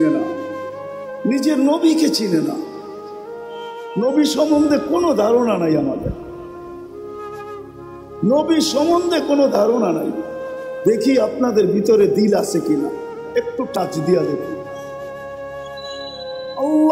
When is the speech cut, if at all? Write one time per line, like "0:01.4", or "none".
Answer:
none